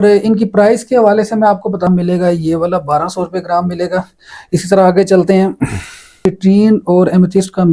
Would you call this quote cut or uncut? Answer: cut